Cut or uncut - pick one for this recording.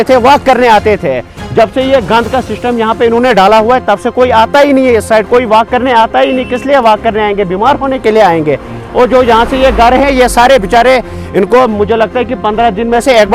uncut